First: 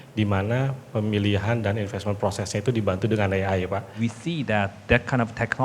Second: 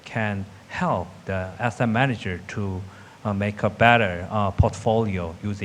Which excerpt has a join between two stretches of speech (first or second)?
first